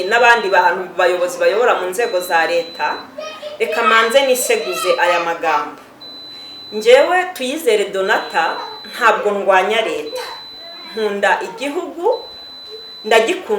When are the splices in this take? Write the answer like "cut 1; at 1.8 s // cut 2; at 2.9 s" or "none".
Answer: none